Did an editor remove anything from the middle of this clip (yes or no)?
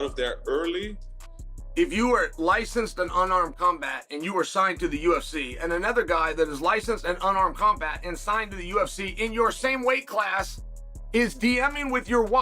yes